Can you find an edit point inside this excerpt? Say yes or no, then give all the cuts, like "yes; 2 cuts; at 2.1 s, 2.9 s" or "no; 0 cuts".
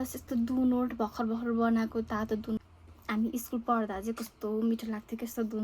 yes; 1 cut; at 2.6 s